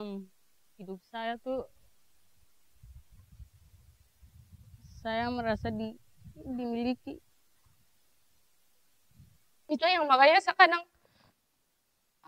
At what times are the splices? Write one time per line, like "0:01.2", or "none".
0:09.7